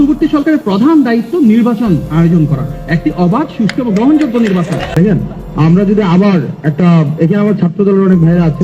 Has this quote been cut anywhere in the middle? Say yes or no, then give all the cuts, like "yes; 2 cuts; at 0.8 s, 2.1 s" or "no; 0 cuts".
yes; 1 cut; at 4.9 s